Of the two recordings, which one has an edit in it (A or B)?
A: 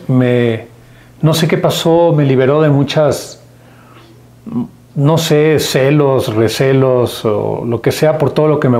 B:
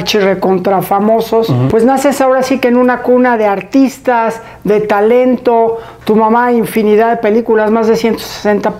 B